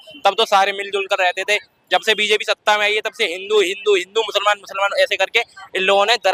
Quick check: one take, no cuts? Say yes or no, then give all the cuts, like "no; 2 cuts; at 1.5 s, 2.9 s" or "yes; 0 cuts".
yes; 0 cuts